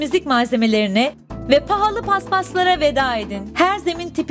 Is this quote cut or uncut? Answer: uncut